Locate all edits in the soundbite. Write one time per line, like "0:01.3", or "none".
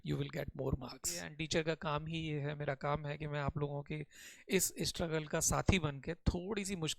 0:01.3